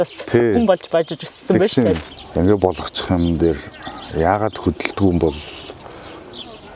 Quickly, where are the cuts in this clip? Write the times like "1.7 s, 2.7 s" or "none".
2.0 s

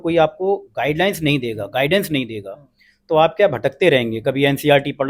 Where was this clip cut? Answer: none

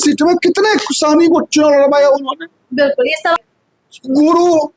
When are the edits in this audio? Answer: 3.4 s

